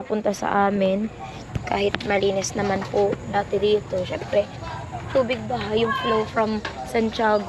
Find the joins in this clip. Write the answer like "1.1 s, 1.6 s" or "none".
none